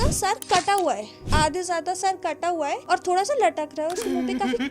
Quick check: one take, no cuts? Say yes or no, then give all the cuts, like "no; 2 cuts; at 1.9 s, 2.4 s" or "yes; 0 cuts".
no; 2 cuts; at 1.2 s, 2.8 s